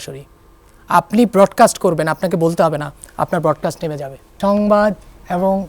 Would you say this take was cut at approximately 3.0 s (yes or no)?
no